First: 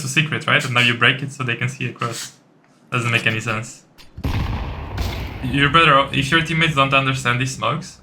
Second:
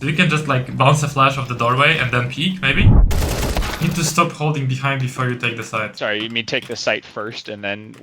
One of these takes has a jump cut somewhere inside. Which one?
second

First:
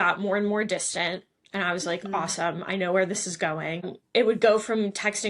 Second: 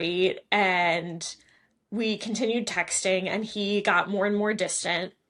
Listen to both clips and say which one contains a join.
first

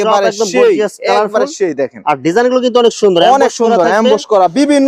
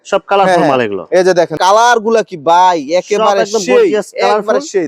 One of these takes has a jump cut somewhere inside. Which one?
second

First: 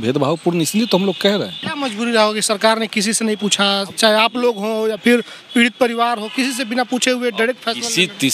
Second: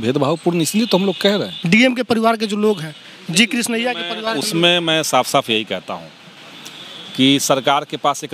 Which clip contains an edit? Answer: first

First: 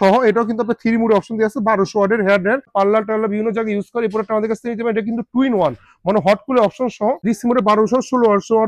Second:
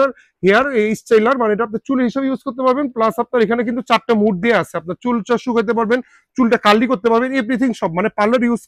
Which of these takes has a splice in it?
first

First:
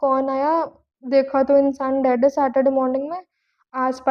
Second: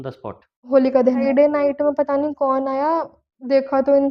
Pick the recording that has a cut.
second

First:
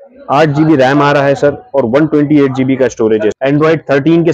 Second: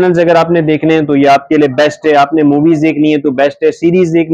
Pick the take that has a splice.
first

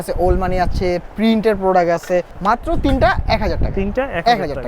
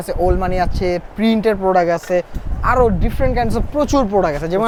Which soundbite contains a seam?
first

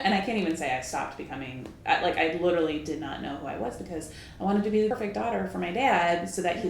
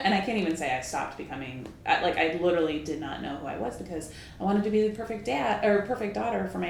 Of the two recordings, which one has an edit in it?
first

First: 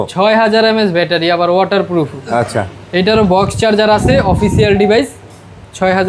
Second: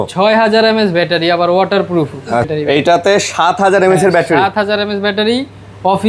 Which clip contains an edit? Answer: second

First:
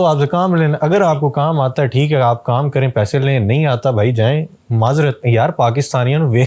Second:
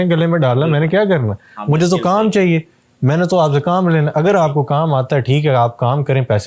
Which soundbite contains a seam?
first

